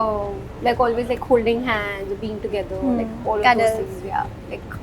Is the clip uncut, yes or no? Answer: yes